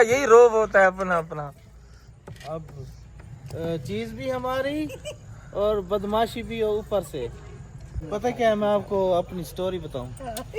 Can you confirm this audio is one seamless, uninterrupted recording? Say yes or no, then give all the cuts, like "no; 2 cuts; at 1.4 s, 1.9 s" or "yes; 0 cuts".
no; 1 cut; at 8.0 s